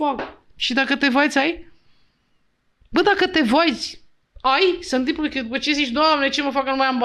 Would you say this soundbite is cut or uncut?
uncut